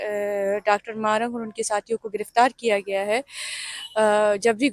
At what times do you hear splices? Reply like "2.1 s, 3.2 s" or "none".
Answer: none